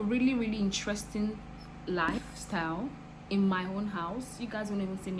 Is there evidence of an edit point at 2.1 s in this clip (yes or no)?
yes